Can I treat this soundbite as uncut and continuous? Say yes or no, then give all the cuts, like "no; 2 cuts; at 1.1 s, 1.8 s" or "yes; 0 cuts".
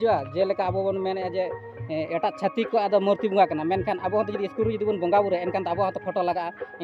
yes; 0 cuts